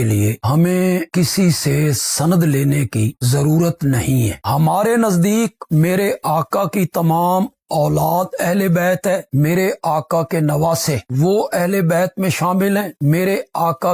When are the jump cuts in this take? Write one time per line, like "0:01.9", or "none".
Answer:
0:04.4